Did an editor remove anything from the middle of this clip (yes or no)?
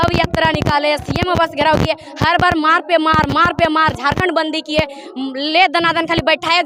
no